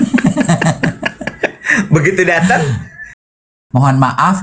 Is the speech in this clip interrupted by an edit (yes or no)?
yes